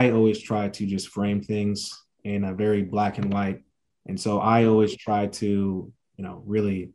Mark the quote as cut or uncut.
cut